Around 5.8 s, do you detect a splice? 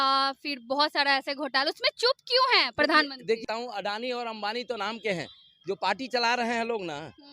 no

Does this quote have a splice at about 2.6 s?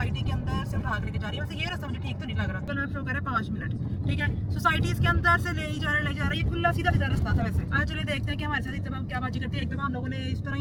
no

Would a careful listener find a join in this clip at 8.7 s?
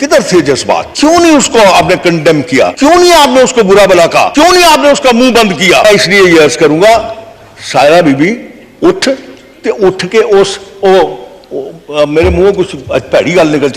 no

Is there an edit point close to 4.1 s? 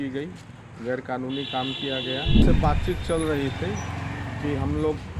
no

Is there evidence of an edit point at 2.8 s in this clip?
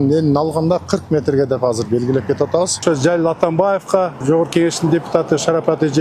yes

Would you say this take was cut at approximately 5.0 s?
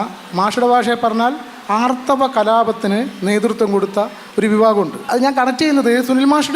yes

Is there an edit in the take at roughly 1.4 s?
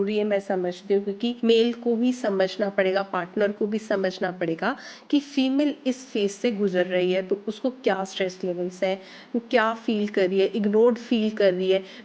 yes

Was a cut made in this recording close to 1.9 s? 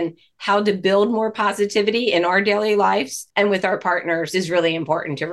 no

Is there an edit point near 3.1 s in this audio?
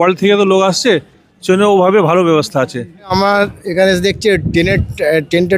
yes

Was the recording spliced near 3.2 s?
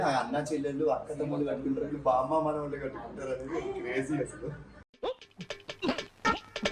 no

